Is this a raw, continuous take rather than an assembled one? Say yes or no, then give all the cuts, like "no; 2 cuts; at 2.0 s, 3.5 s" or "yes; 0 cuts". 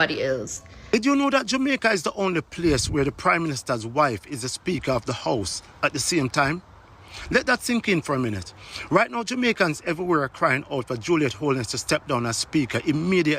no; 1 cut; at 0.9 s